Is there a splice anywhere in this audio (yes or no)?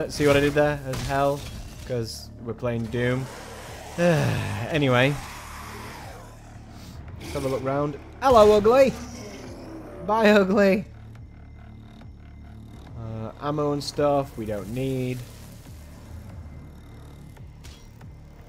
yes